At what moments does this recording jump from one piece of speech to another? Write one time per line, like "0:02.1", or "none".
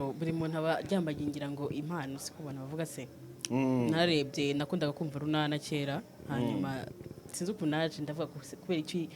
none